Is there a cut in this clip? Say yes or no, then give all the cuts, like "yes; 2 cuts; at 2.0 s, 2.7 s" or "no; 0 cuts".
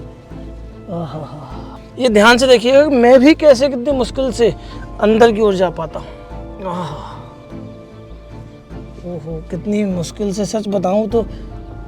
yes; 1 cut; at 1.8 s